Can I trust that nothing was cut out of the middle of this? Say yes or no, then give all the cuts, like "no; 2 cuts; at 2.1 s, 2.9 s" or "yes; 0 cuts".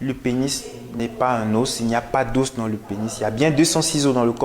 no; 1 cut; at 1.0 s